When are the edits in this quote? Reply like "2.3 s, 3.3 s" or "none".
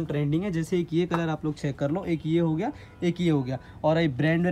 none